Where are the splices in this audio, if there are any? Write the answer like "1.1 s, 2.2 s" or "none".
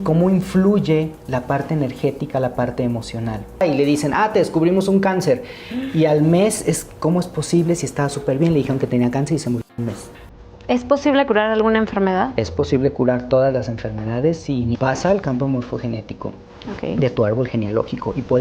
3.6 s, 10.0 s, 14.8 s